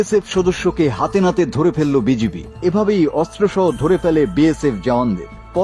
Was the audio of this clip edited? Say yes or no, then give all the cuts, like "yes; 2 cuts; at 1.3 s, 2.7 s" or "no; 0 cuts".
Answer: yes; 1 cut; at 2.5 s